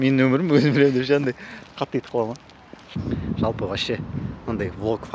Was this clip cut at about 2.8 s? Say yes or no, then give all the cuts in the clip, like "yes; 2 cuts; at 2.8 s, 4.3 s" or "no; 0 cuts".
yes; 1 cut; at 2.8 s